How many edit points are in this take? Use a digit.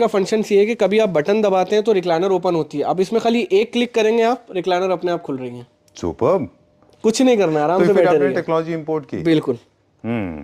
0